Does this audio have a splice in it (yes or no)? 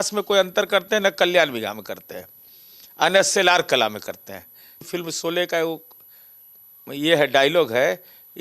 yes